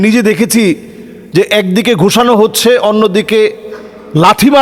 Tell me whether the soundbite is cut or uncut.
uncut